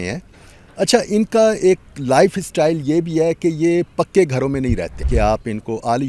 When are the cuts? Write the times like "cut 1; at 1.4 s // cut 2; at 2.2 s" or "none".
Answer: cut 1; at 5.1 s